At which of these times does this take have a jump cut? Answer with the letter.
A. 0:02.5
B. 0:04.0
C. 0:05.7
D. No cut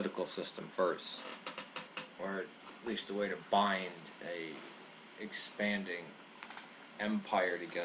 C